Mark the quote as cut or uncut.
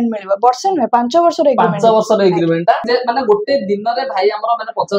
cut